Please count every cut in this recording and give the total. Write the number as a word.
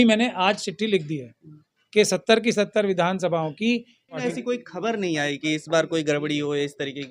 one